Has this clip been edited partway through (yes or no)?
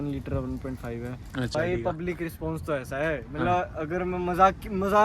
yes